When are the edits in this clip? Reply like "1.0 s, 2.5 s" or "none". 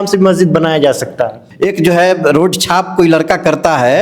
1.4 s